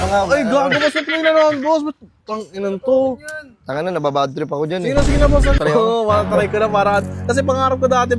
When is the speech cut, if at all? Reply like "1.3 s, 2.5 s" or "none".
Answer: 5.6 s